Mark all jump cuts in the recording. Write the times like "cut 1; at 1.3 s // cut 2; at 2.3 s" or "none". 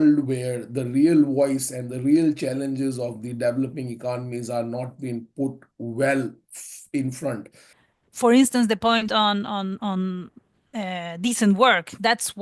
cut 1; at 7.7 s

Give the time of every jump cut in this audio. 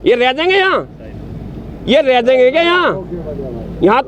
none

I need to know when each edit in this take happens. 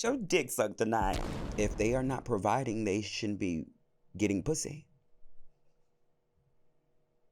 cut 1; at 1.4 s

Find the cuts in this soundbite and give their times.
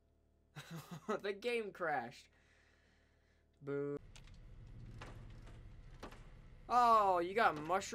cut 1; at 4.1 s

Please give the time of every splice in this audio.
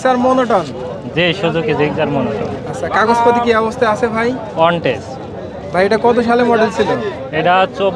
none

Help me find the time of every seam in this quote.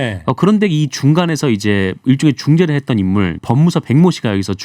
cut 1; at 3.4 s

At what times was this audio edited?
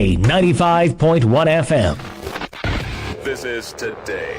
cut 1; at 2.1 s

